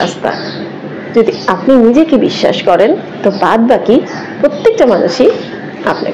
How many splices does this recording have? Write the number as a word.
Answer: zero